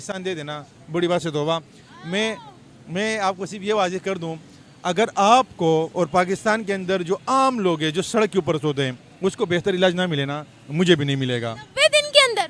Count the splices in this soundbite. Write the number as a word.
zero